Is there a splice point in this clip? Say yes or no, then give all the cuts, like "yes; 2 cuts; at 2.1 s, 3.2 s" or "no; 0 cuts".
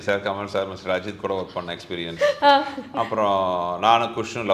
no; 0 cuts